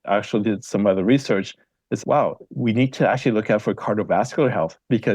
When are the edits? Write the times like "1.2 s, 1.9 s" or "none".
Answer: 2.0 s